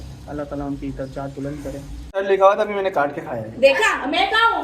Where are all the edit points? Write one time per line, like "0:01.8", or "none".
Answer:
0:02.0